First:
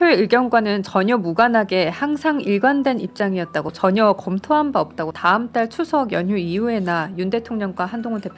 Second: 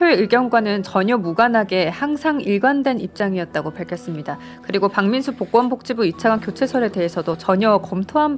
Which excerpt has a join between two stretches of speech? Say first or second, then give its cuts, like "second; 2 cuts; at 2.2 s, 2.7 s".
first; 2 cuts; at 3.7 s, 5.1 s